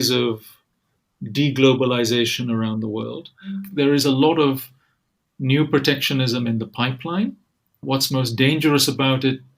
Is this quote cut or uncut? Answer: cut